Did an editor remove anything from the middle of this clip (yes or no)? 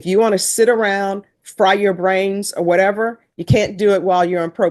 no